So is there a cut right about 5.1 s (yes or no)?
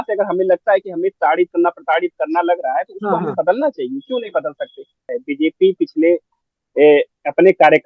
yes